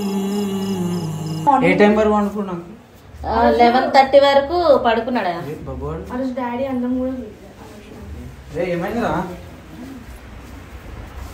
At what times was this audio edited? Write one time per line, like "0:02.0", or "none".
0:01.4